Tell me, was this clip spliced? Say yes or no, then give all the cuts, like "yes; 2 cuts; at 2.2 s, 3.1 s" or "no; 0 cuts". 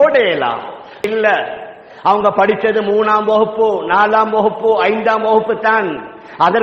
yes; 1 cut; at 1.1 s